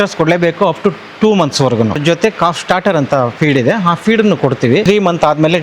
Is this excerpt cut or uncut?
cut